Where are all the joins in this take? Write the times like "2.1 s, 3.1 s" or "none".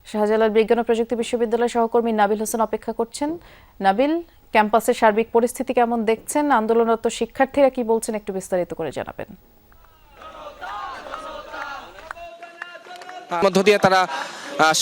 13.4 s